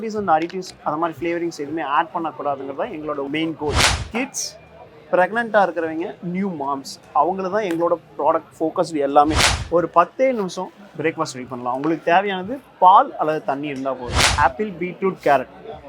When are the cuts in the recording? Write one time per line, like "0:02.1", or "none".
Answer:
0:03.8
0:09.5
0:14.2